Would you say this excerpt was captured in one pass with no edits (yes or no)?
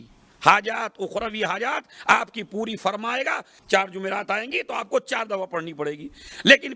no